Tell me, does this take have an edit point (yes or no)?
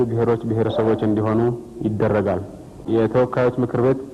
yes